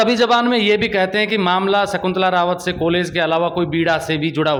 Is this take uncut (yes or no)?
yes